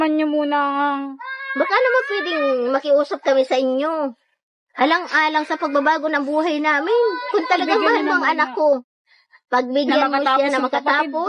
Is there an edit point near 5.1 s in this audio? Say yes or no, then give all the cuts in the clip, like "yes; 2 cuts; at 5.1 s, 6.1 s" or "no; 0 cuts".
yes; 1 cut; at 5.1 s